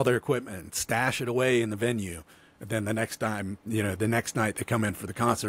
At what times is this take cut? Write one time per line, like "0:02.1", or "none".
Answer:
none